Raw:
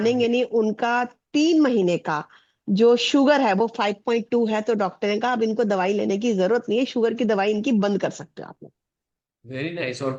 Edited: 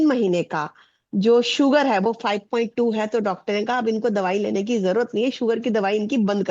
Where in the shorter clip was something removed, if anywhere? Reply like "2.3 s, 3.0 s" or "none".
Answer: none